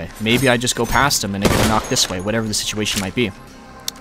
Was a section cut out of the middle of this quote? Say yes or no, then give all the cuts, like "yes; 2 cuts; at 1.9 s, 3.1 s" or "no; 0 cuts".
no; 0 cuts